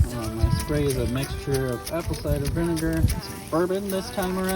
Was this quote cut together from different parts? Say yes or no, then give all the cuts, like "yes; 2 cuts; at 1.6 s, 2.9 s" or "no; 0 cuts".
yes; 1 cut; at 3.1 s